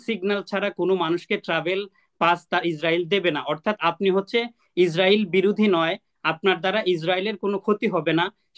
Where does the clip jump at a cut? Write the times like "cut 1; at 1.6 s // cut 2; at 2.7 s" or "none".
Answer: none